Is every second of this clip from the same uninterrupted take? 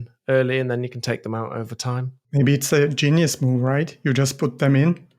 no; 1 cut; at 2.1 s

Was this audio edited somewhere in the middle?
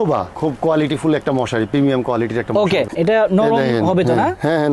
yes; 1 cut; at 2.9 s

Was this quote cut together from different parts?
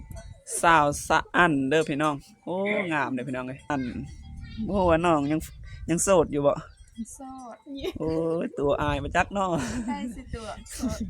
yes; 1 cut; at 3.7 s

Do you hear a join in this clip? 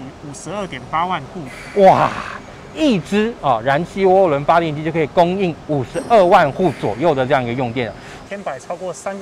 yes; 1 cut; at 8.2 s

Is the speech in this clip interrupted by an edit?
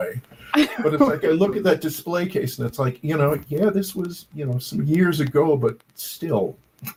no; 0 cuts

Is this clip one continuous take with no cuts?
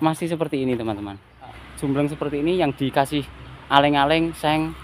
no; 1 cut; at 1.6 s

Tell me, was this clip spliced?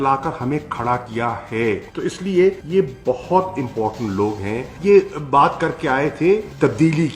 yes; 1 cut; at 4.8 s

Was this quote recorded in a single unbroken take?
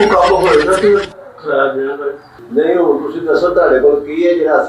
no; 1 cut; at 2.4 s

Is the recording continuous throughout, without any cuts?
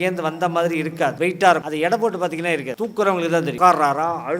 no; 4 cuts; at 1.1 s, 1.7 s, 2.7 s, 3.5 s

